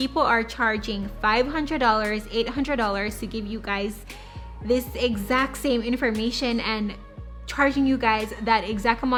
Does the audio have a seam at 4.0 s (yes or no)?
no